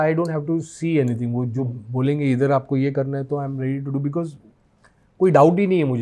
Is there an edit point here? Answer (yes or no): no